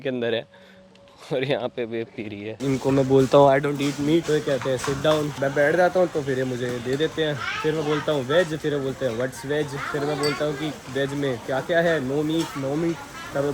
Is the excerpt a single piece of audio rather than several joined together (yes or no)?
no